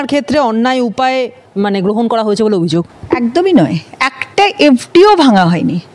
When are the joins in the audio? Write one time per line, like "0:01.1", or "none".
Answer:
none